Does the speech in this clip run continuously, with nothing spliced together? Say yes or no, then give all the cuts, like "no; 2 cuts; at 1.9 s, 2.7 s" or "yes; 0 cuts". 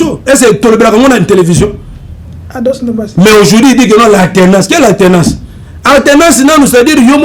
yes; 0 cuts